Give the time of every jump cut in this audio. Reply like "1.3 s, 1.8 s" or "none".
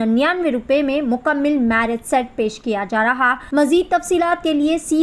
3.4 s